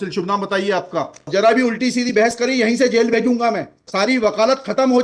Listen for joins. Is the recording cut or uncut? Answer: cut